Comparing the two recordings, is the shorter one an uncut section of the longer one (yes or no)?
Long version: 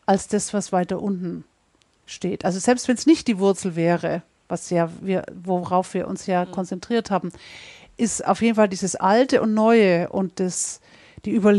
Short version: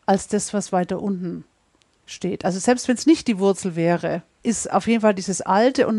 no